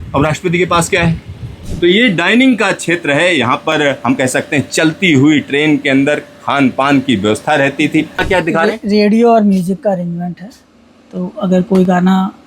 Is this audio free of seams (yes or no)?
no